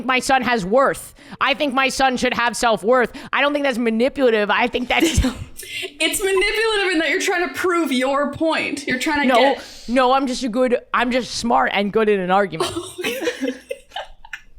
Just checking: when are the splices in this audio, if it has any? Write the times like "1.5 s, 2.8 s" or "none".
none